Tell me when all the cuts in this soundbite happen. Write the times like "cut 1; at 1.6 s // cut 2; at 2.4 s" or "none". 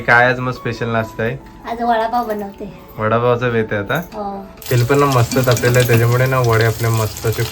cut 1; at 4.5 s

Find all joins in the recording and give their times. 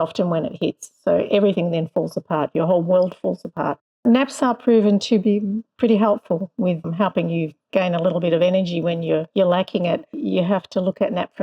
cut 1; at 4.0 s // cut 2; at 5.0 s // cut 3; at 6.9 s // cut 4; at 9.3 s // cut 5; at 10.2 s

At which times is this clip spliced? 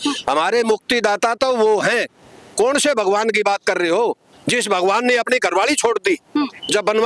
none

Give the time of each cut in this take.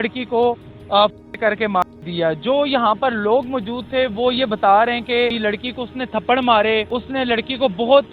cut 1; at 5.4 s // cut 2; at 6.9 s

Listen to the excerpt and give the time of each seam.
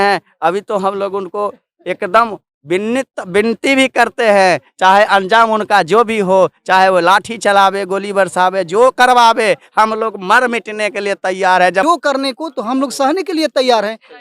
cut 1; at 11.8 s

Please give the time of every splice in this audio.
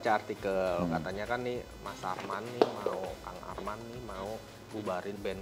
none

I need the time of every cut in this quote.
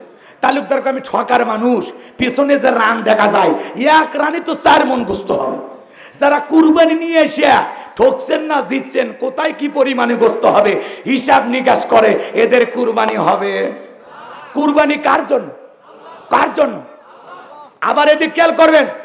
none

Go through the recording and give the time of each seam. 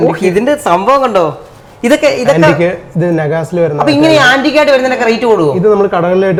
none

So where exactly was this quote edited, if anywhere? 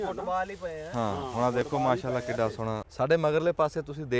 cut 1; at 2.9 s

